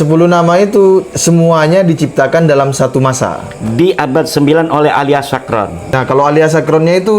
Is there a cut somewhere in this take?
yes; 1 cut; at 5.8 s

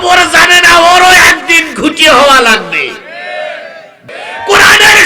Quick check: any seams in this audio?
yes; 1 cut; at 4.1 s

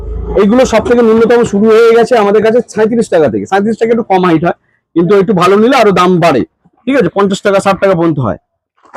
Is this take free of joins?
yes; 0 cuts

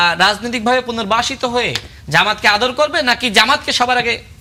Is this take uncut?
yes; 0 cuts

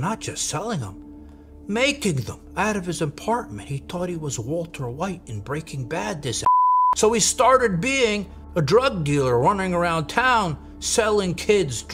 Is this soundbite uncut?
yes; 0 cuts

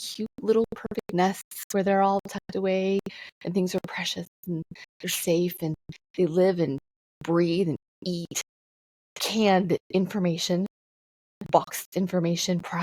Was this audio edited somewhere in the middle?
no; 0 cuts

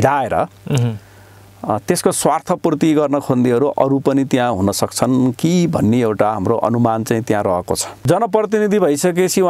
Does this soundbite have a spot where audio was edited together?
yes; 1 cut; at 8.0 s

